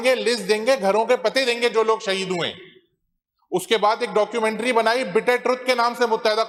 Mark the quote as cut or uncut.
uncut